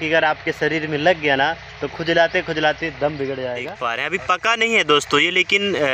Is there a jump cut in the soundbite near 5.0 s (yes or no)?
no